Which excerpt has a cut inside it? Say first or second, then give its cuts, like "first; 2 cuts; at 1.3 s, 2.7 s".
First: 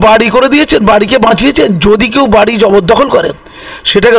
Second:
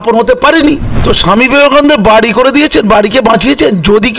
second; 1 cut; at 0.9 s